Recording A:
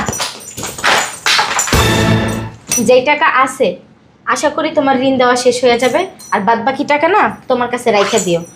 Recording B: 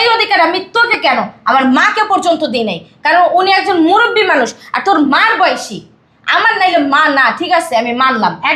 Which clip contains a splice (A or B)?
A